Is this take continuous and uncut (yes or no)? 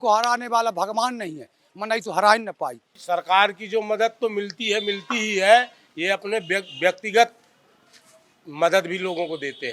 no